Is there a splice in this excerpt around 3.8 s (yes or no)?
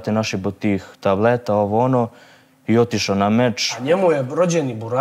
yes